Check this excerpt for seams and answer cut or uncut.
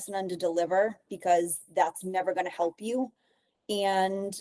uncut